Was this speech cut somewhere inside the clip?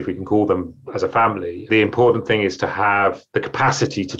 no; 0 cuts

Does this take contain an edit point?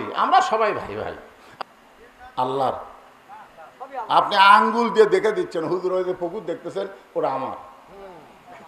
yes; 1 cut; at 1.4 s

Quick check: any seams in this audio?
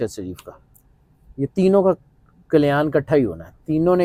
no; 0 cuts

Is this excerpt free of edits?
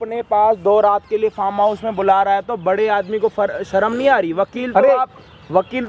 yes; 0 cuts

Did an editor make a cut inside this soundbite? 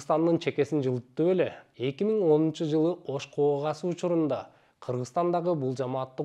yes; 1 cut; at 1.6 s

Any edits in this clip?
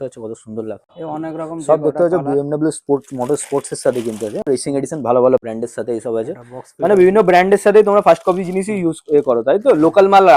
yes; 2 cuts; at 0.9 s, 5.4 s

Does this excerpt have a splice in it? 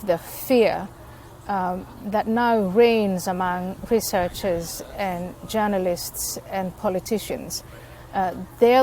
no; 0 cuts

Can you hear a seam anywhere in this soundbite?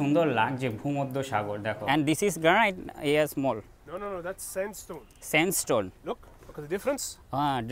yes; 1 cut; at 1.8 s

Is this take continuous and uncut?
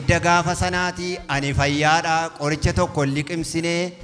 yes; 0 cuts

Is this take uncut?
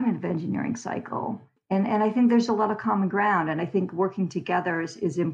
yes; 0 cuts

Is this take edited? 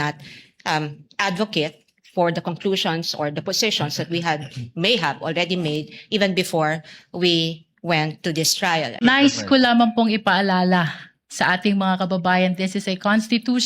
yes; 1 cut; at 9.0 s

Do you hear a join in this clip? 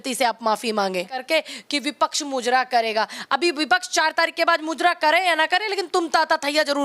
yes; 1 cut; at 1.2 s

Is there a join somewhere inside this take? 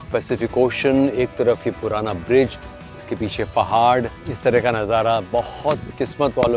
no; 0 cuts

